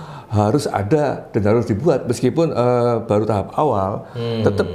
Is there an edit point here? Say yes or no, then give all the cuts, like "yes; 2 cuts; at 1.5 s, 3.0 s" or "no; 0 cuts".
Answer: no; 0 cuts